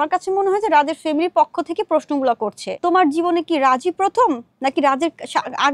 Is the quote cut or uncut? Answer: cut